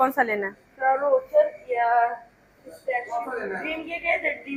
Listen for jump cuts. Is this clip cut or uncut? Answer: uncut